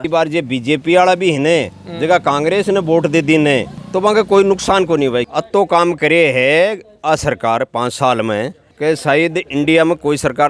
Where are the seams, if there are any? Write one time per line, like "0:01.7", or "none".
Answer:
0:03.8
0:05.3
0:08.6